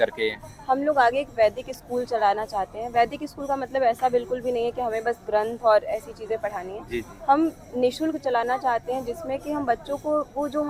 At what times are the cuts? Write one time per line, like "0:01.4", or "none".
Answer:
none

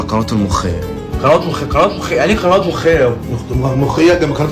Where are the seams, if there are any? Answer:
none

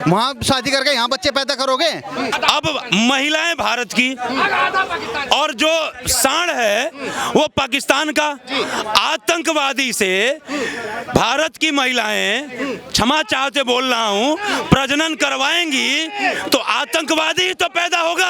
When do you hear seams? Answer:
0:02.3

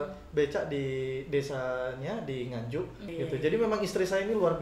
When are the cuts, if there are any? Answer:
0:03.0

